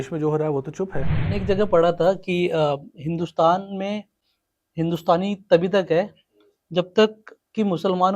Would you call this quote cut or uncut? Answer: cut